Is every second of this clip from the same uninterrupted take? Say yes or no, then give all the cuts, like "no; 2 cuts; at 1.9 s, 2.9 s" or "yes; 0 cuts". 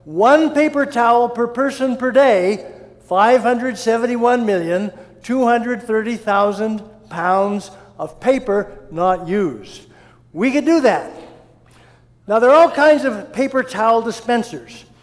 no; 1 cut; at 7.5 s